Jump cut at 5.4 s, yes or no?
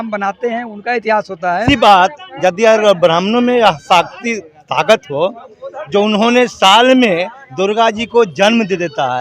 no